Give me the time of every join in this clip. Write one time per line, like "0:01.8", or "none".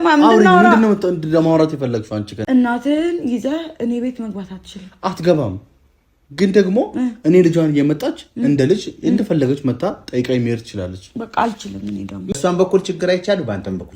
0:02.4
0:12.3